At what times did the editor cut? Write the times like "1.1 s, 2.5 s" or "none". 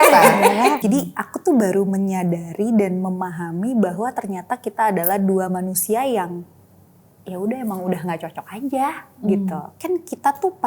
0.8 s, 9.7 s